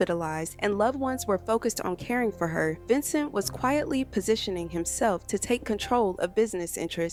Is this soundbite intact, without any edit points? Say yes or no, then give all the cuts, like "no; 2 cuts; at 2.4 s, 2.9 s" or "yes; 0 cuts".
yes; 0 cuts